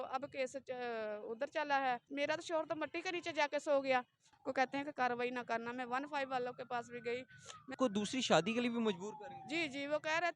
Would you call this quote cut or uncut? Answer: cut